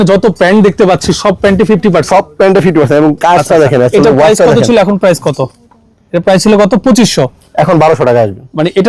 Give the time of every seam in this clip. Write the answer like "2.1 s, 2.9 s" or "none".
none